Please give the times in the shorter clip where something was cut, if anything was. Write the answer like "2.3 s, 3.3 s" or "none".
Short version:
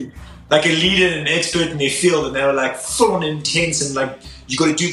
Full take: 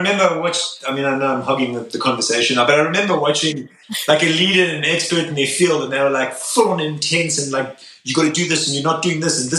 none